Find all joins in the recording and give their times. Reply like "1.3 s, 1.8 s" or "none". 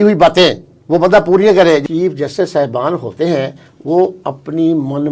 1.8 s